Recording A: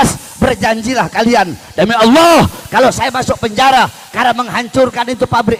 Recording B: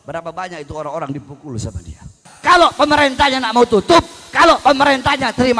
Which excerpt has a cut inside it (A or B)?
B